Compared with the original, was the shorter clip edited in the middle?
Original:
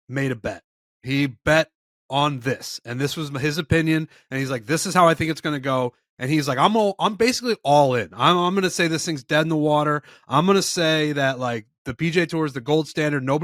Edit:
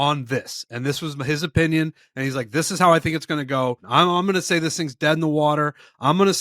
yes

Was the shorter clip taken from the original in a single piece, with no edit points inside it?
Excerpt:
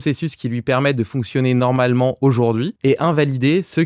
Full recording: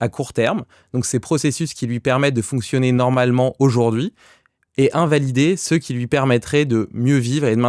no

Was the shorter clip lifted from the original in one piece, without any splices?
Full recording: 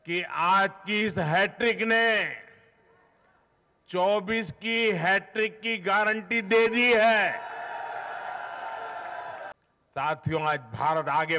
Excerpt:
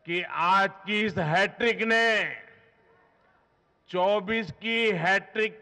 yes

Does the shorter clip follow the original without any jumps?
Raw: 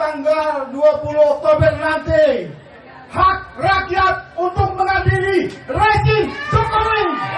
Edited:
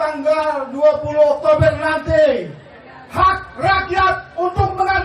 yes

